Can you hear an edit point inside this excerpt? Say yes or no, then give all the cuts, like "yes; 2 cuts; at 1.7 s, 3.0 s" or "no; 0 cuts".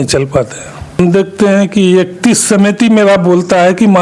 yes; 1 cut; at 1.0 s